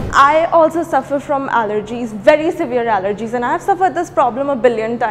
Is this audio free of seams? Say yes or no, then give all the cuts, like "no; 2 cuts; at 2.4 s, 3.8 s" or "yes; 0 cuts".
yes; 0 cuts